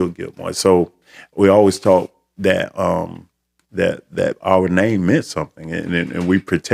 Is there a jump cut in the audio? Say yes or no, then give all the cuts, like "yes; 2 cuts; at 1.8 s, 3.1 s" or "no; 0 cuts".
no; 0 cuts